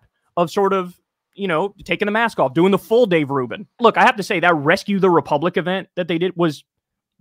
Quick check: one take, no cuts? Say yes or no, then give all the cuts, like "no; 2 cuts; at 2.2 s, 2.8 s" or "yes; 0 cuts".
no; 1 cut; at 3.8 s